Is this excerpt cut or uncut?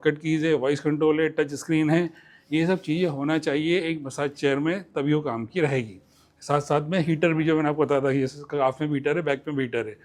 uncut